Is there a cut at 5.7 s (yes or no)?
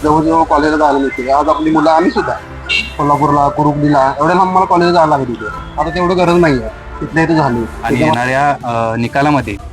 no